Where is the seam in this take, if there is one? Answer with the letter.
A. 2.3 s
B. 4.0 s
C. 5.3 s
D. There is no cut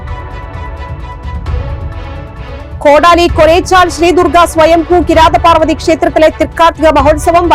A